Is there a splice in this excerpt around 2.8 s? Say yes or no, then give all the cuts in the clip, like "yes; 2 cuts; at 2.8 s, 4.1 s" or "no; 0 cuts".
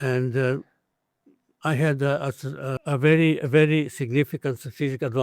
yes; 1 cut; at 2.8 s